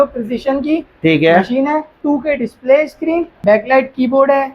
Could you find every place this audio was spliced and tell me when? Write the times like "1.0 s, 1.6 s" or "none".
1.9 s, 3.3 s